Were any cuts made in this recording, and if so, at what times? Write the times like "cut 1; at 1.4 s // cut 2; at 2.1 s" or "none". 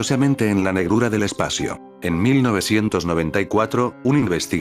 cut 1; at 1.9 s